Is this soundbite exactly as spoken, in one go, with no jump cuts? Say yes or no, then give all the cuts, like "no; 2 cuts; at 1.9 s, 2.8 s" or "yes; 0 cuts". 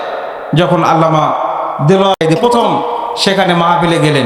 no; 1 cut; at 2.2 s